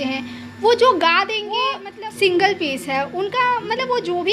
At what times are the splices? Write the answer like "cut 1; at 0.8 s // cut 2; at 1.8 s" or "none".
cut 1; at 1.9 s